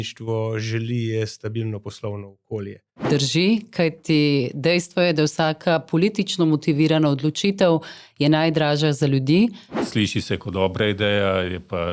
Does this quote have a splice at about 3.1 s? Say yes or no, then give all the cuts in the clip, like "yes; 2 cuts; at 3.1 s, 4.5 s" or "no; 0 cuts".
yes; 2 cuts; at 3.1 s, 9.7 s